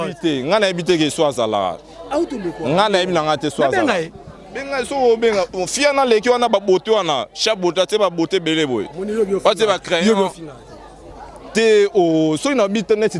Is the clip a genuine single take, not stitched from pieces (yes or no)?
yes